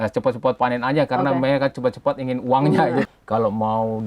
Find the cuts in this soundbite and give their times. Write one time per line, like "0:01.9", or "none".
0:03.1